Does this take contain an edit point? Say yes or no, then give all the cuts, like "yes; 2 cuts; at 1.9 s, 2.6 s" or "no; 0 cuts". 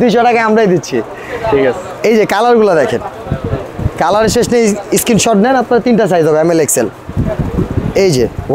no; 0 cuts